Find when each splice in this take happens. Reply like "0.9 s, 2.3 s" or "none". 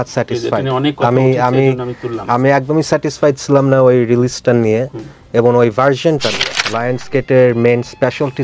6.7 s